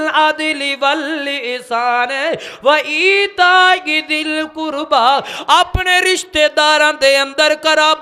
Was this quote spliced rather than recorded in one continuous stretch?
no; 0 cuts

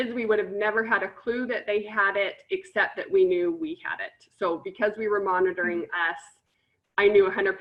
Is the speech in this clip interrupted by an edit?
no; 0 cuts

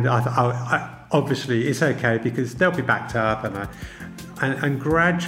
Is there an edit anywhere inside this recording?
no; 0 cuts

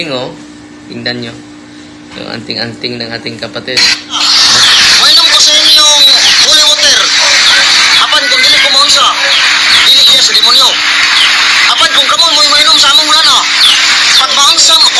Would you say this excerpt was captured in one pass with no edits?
no; 1 cut; at 4.2 s

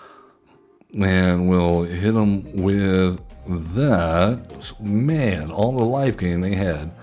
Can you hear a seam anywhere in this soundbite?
yes; 1 cut; at 4.7 s

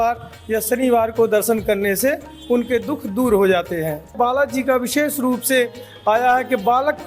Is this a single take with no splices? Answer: no; 1 cut; at 4.2 s

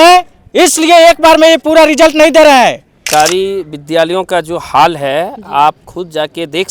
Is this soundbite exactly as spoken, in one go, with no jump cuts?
no; 1 cut; at 2.9 s

